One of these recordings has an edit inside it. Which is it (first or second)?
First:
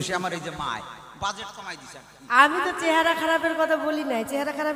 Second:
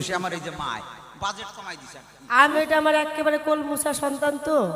second